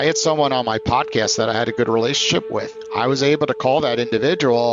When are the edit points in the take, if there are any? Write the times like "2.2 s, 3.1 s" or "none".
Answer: none